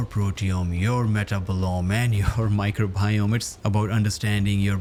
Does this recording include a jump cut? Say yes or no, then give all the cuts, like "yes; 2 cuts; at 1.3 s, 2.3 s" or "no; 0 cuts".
no; 0 cuts